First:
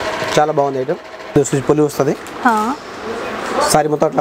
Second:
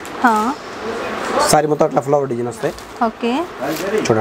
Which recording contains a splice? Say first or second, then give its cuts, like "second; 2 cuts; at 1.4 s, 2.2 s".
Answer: first; 1 cut; at 1.2 s